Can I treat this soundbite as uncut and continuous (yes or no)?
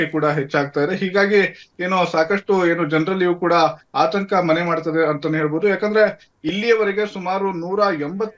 yes